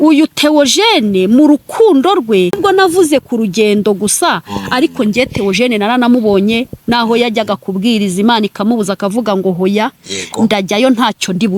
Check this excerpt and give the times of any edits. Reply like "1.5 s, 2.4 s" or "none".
2.6 s